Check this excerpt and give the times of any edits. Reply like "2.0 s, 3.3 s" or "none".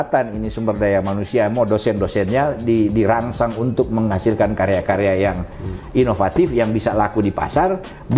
none